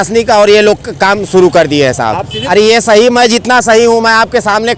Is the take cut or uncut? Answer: cut